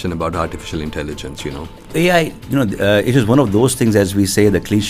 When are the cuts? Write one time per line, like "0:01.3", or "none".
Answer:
0:01.9